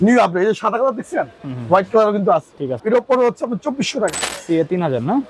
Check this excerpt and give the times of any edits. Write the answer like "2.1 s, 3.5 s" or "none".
2.8 s, 4.2 s